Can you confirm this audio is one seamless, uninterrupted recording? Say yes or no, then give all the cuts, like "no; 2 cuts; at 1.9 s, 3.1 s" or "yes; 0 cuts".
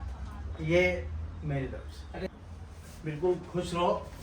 no; 1 cut; at 2.3 s